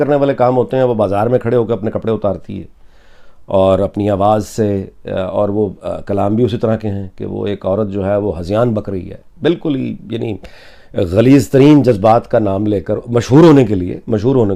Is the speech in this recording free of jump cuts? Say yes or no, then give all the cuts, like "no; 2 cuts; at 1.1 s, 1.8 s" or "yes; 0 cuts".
yes; 0 cuts